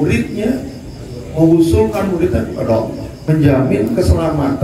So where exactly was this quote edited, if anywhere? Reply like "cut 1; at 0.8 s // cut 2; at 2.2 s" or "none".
cut 1; at 3.1 s